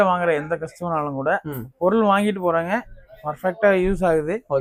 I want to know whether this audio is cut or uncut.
uncut